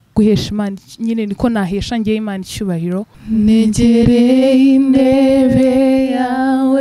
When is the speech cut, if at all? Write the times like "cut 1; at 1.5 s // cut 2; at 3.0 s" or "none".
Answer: cut 1; at 3.2 s